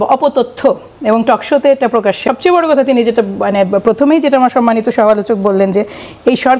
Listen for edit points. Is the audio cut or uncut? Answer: cut